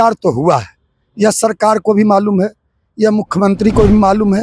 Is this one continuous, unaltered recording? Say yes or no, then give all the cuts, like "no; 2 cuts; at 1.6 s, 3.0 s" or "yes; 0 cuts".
yes; 0 cuts